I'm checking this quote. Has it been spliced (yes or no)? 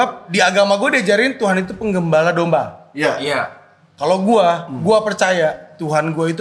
no